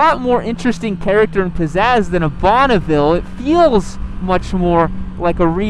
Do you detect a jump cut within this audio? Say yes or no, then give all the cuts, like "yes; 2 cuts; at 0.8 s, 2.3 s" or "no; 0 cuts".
no; 0 cuts